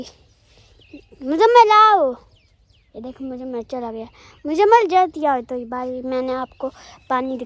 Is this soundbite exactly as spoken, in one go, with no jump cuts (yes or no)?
yes